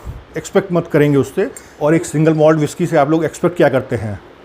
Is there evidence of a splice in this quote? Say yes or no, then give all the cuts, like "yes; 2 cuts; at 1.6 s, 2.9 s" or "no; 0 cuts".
yes; 1 cut; at 1.6 s